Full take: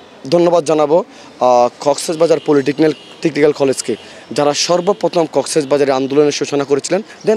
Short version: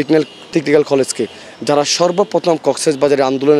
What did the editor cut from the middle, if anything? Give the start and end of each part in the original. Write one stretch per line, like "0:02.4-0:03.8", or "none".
none